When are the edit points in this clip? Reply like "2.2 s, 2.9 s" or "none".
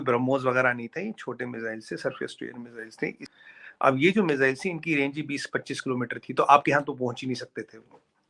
3.3 s

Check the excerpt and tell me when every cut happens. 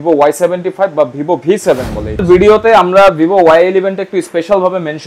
2.2 s

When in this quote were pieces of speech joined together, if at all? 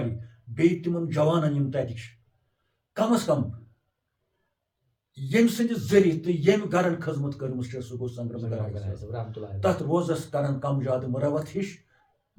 none

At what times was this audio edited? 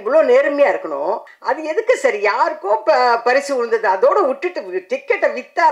1.3 s

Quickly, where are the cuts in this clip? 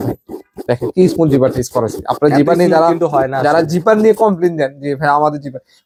none

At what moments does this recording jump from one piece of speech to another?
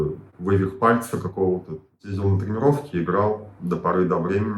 2.1 s

